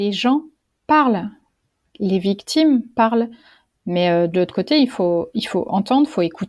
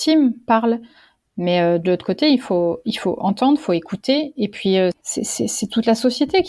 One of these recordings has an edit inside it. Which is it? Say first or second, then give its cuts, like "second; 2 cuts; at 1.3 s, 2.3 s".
second; 1 cut; at 5.0 s